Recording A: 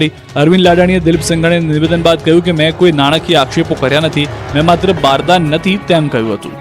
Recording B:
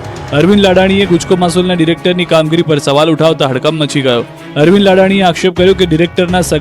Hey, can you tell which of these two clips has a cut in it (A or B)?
B